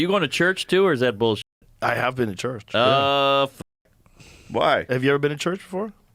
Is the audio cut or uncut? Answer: uncut